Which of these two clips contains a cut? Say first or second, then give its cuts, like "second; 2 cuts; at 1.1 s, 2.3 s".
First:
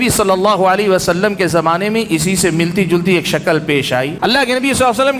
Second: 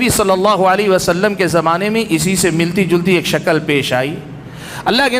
first; 1 cut; at 4.1 s